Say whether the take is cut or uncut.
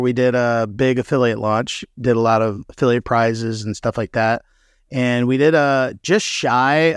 uncut